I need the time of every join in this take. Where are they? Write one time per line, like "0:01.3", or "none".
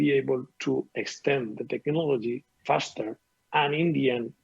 0:02.6